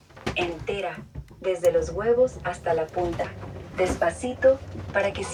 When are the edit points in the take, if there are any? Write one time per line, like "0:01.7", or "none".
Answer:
none